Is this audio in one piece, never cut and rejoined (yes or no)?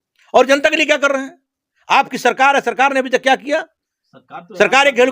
yes